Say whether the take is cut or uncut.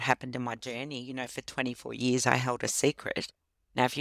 uncut